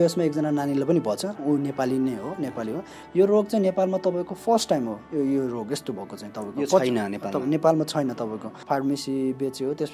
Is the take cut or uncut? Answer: cut